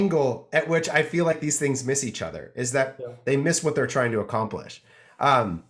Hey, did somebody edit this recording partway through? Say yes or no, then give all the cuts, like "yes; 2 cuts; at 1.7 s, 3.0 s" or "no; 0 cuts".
no; 0 cuts